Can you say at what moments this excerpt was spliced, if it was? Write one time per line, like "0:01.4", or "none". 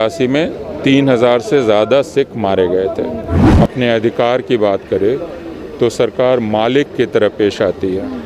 0:03.4